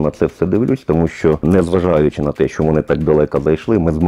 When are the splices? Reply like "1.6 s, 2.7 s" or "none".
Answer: 1.4 s